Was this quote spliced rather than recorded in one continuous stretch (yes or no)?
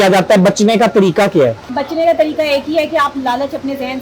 yes